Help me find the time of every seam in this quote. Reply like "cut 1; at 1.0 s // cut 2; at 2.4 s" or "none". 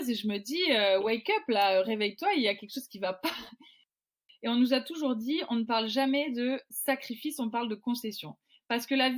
cut 1; at 3.9 s